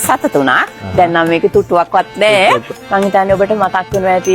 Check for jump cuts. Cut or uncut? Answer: cut